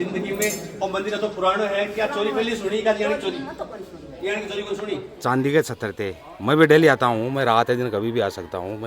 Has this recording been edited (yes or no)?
yes